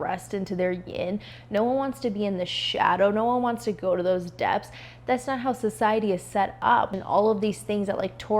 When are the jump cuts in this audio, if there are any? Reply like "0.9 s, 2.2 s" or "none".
6.9 s